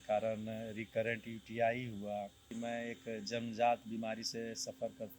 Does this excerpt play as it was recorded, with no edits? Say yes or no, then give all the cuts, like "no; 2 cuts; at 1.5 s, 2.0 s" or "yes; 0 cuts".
no; 1 cut; at 2.5 s